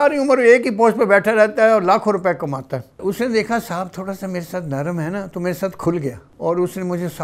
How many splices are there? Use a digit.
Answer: 2